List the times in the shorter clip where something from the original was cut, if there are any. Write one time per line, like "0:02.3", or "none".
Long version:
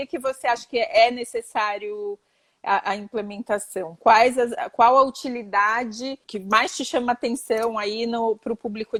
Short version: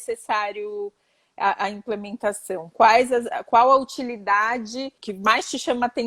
none